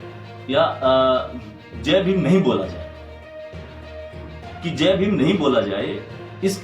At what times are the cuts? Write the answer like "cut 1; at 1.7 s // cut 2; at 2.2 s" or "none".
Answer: cut 1; at 2.7 s // cut 2; at 4.6 s